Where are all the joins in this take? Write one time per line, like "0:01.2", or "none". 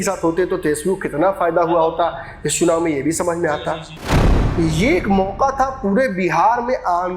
0:04.3